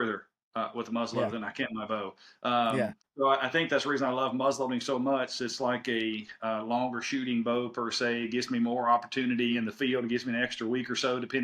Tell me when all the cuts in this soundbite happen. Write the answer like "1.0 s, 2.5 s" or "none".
2.8 s